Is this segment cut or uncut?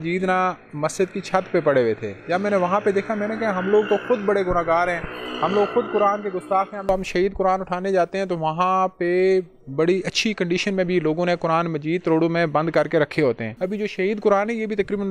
cut